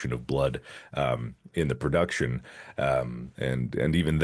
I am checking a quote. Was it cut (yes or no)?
no